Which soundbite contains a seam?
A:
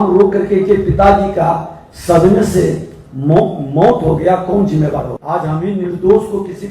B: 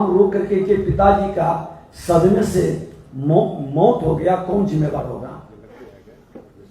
A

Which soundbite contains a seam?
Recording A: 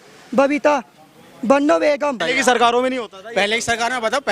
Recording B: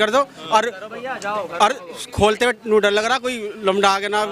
A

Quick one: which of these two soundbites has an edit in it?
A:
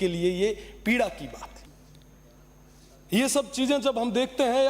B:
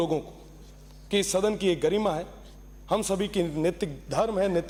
A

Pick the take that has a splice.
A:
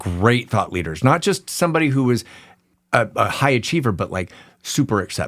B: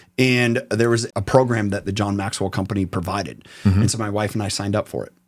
B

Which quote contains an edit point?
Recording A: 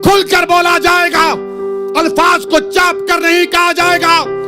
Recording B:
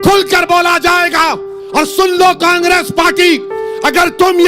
B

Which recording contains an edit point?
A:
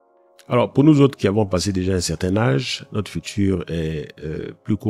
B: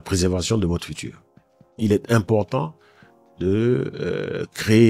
B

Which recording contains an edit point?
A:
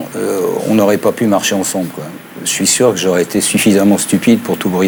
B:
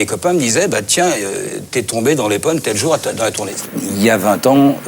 B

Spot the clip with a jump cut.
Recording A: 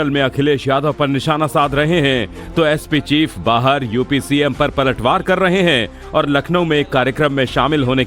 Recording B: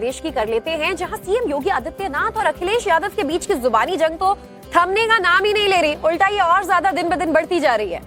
A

